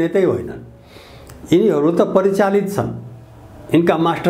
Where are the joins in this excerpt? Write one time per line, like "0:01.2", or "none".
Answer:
none